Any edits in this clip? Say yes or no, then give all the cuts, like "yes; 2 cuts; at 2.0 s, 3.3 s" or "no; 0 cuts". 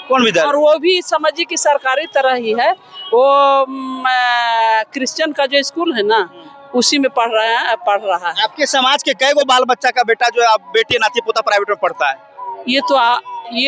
no; 0 cuts